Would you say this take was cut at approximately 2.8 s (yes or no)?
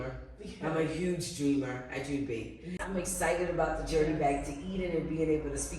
yes